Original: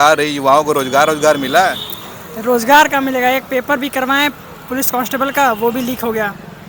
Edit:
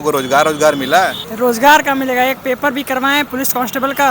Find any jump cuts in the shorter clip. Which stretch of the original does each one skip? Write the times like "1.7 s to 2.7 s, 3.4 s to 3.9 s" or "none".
1.9 s to 2.3 s, 4.4 s to 4.7 s